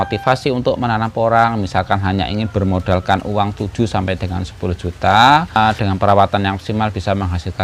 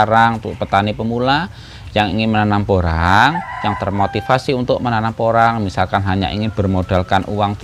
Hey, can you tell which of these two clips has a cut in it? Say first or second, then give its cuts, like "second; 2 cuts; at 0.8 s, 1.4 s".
first; 1 cut; at 5.6 s